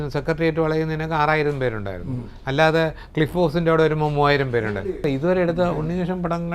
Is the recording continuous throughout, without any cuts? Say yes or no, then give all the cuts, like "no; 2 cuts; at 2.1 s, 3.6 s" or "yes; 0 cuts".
no; 1 cut; at 5.0 s